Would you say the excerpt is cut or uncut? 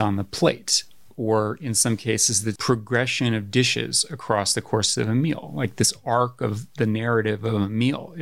cut